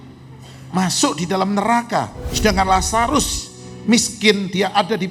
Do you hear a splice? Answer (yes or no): yes